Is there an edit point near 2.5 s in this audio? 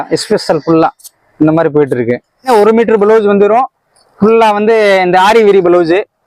yes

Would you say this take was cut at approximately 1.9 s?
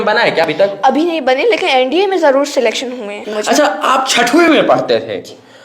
no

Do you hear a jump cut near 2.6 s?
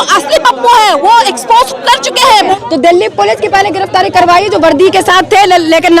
yes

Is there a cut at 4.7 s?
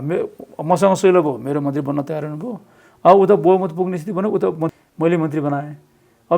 yes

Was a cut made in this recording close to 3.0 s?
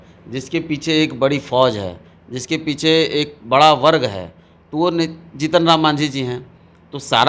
no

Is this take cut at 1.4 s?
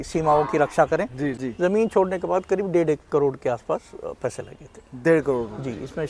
yes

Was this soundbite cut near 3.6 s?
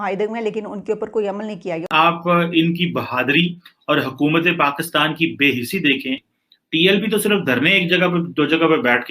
no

